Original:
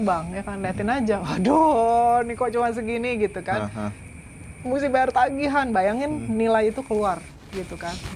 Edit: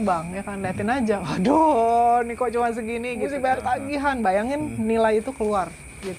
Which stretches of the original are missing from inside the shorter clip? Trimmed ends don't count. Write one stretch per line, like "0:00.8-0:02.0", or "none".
0:03.2-0:04.7